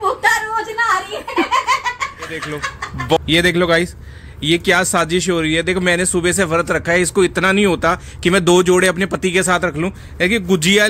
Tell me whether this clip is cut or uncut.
cut